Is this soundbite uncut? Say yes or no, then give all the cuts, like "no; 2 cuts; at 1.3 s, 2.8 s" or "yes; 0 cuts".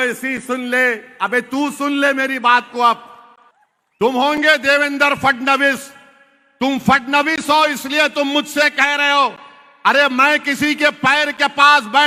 yes; 0 cuts